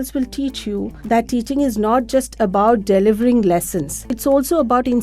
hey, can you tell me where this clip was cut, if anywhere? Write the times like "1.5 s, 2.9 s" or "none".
0.9 s, 4.1 s